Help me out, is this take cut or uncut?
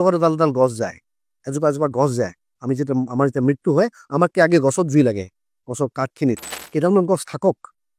cut